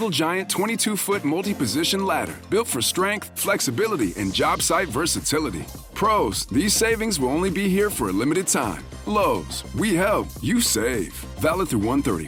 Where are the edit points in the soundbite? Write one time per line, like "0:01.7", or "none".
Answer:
none